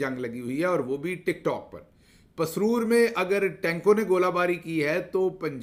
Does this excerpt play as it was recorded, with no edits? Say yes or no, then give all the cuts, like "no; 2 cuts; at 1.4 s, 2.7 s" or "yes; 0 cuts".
yes; 0 cuts